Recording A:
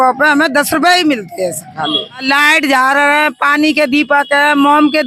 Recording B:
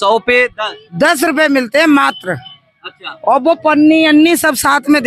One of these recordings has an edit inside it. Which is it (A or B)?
A